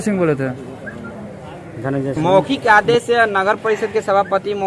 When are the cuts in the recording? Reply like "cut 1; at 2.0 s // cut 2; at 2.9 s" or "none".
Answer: cut 1; at 2.1 s